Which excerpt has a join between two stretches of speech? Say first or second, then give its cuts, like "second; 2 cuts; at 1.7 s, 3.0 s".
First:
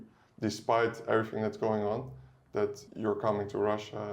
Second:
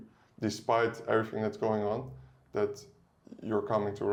first; 1 cut; at 2.9 s